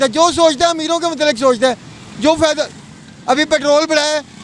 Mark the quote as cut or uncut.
uncut